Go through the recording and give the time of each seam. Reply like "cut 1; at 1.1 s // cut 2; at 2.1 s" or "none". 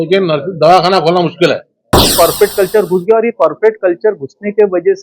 cut 1; at 2.1 s